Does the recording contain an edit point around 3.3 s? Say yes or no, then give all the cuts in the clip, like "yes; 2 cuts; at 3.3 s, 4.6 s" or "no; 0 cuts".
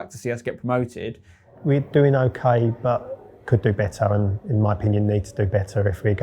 no; 1 cut; at 1.5 s